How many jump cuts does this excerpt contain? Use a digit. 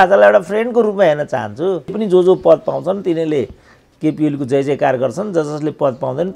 1